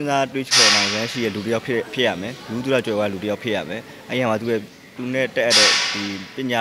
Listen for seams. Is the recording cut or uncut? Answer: uncut